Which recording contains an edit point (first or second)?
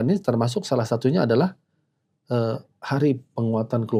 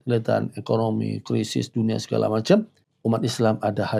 second